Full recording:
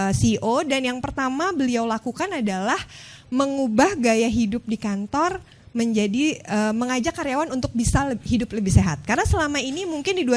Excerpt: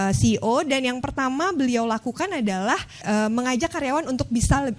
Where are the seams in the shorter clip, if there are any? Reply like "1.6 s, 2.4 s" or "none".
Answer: 3.0 s